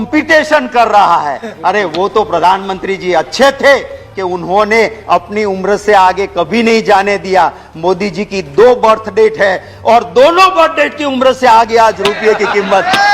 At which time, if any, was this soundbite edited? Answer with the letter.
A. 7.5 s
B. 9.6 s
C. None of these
C